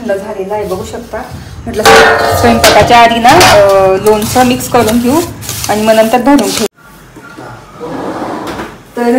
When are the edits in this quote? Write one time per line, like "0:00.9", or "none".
0:06.7